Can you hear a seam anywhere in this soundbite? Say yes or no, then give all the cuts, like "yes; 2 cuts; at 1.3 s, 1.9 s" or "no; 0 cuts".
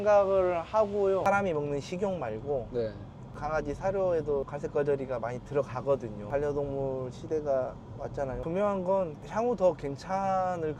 yes; 3 cuts; at 1.2 s, 6.2 s, 8.4 s